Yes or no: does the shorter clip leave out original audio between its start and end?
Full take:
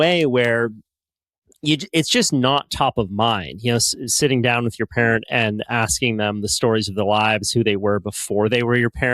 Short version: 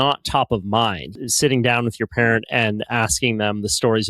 yes